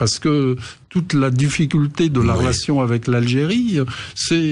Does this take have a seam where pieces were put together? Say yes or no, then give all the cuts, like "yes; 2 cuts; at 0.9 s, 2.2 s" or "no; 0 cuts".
no; 0 cuts